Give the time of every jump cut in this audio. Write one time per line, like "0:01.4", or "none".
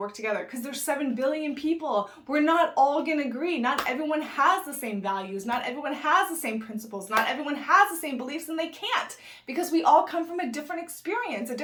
none